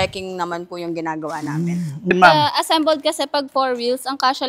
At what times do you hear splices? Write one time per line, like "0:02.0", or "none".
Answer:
0:02.1